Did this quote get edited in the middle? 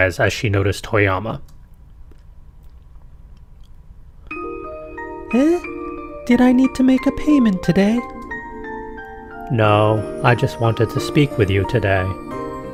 no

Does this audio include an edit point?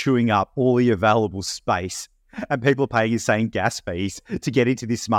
no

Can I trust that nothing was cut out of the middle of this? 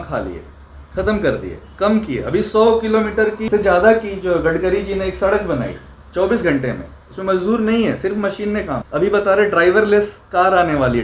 no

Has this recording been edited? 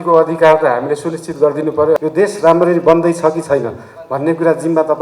yes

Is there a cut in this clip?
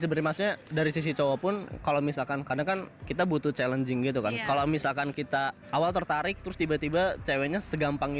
no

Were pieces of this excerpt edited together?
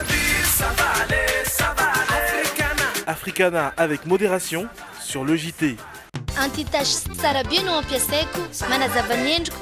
yes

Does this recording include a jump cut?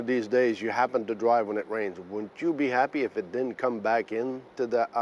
no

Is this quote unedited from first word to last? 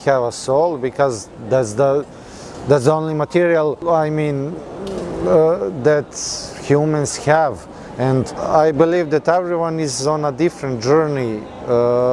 yes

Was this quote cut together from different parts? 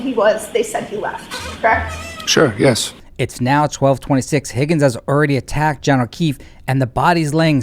yes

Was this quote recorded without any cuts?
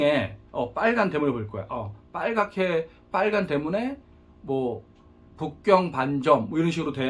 yes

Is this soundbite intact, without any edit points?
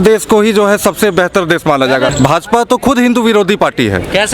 no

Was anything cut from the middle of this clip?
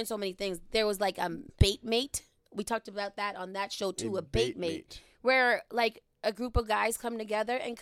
yes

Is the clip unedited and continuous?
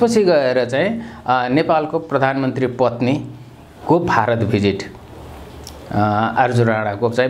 yes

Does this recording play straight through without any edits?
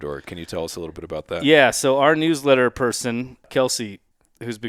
yes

